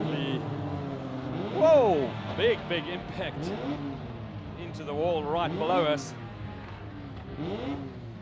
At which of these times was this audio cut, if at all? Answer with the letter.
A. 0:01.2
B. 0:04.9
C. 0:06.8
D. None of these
D